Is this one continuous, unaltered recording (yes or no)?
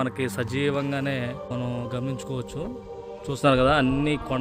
no